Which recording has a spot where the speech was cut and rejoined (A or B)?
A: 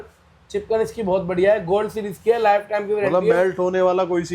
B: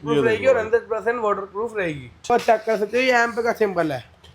B